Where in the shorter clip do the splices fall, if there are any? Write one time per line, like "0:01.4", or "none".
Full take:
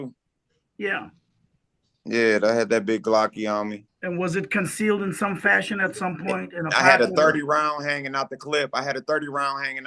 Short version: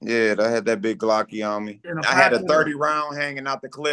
0:01.8

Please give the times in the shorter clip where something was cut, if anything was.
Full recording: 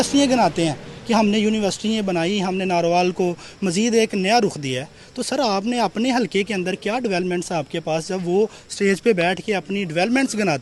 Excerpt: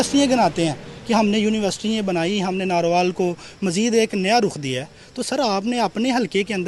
none

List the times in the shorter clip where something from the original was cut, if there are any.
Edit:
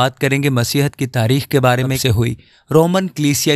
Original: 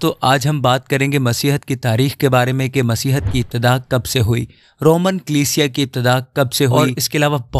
0:02.0

